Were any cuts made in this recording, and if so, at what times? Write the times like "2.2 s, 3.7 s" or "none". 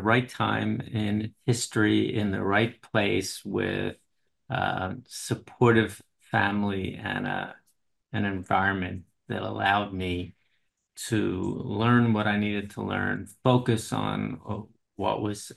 none